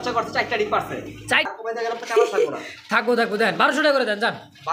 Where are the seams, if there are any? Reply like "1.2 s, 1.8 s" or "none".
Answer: 1.5 s